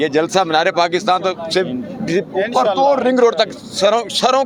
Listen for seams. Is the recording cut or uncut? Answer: uncut